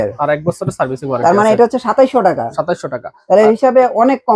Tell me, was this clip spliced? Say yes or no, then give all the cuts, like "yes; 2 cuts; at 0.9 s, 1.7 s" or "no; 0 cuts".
no; 0 cuts